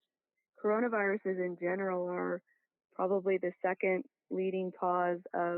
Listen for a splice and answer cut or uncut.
uncut